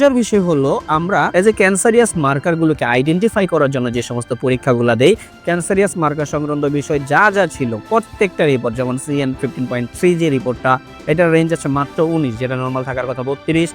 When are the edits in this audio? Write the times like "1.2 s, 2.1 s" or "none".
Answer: 1.3 s